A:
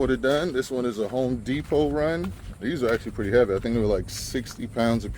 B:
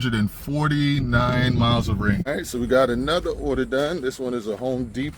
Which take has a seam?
B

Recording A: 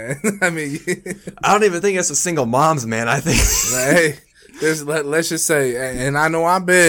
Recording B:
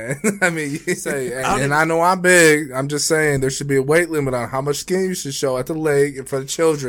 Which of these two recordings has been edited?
B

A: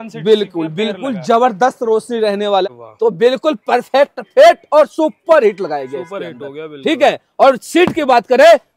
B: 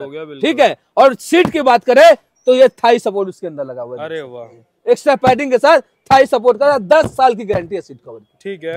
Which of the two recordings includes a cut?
A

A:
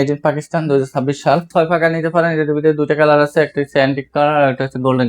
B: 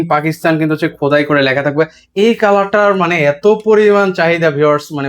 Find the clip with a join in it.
A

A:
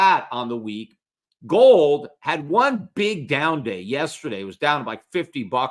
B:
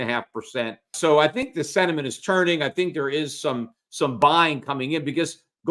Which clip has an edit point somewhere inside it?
B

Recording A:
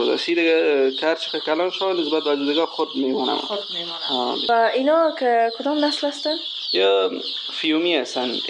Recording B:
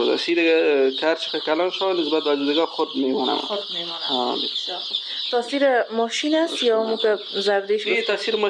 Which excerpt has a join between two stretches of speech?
A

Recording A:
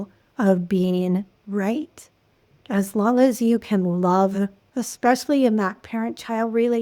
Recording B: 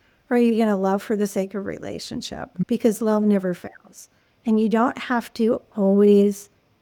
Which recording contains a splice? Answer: A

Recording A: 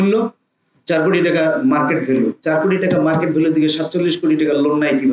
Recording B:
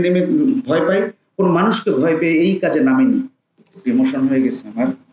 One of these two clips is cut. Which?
B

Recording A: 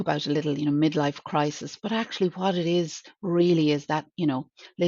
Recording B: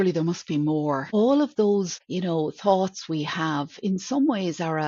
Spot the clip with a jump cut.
B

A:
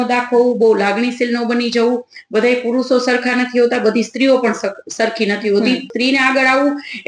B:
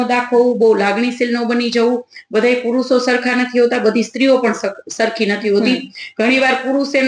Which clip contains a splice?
A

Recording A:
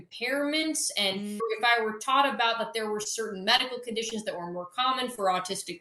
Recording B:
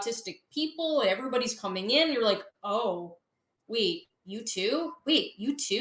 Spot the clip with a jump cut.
A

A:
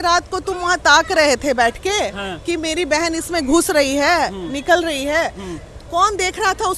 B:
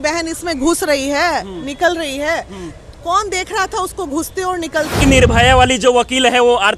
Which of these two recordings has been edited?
B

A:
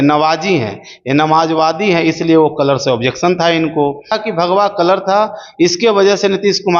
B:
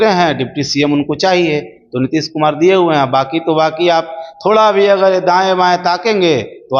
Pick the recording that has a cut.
A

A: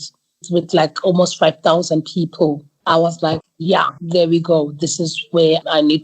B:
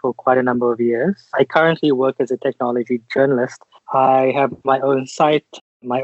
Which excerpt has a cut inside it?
A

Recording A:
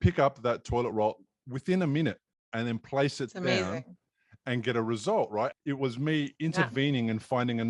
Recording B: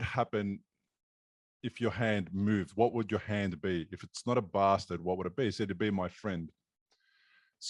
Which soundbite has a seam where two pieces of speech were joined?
A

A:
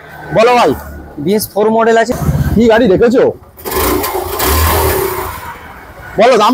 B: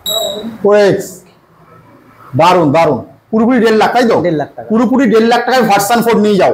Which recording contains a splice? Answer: A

